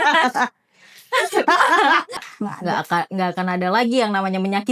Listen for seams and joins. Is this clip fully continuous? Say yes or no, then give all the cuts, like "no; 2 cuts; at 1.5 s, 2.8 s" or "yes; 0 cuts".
no; 1 cut; at 2.2 s